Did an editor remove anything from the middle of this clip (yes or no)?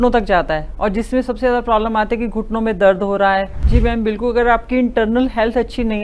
yes